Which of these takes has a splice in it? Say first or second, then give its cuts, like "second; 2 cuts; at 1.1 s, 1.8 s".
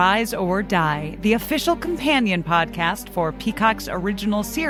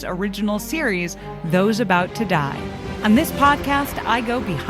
second; 1 cut; at 2.9 s